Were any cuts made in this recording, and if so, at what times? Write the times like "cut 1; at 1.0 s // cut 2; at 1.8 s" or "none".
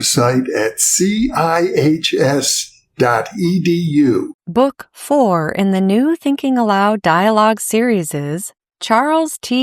cut 1; at 4.4 s

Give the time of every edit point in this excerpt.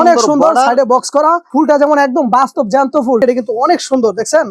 cut 1; at 3.2 s

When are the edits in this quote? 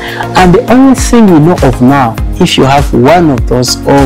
cut 1; at 2.3 s

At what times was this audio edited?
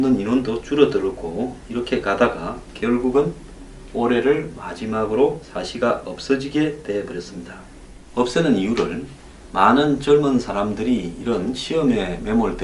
none

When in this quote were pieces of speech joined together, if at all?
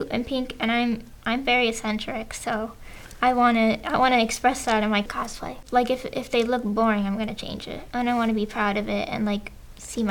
cut 1; at 5.1 s // cut 2; at 7.8 s

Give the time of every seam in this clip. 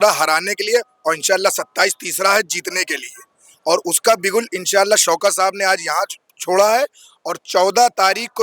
none

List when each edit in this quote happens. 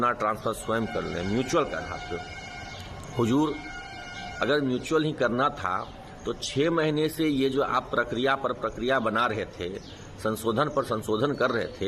none

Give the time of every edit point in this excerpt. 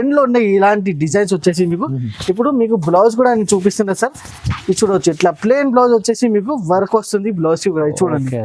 none

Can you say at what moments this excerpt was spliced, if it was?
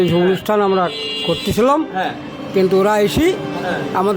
none

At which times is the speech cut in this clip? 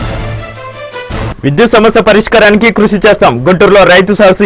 cut 1; at 1.2 s

